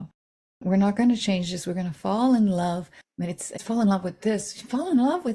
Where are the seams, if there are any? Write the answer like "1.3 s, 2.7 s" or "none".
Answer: 3.6 s

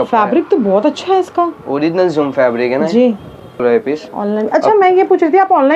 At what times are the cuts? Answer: 3.6 s

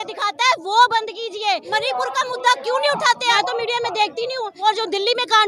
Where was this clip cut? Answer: 1.6 s, 3.3 s, 4.5 s

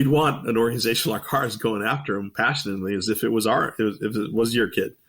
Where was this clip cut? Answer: none

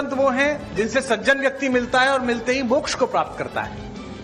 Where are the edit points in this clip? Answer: 3.1 s

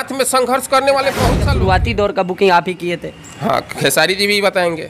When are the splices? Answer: 1.4 s

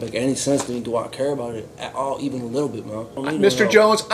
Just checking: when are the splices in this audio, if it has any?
3.2 s

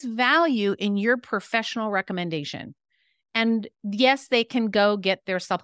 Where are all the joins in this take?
none

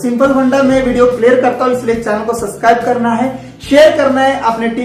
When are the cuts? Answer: none

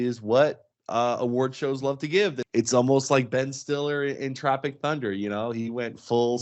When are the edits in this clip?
2.4 s

